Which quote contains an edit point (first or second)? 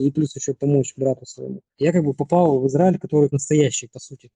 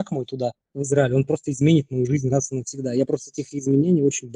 first